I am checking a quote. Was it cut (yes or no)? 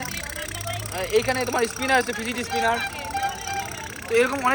no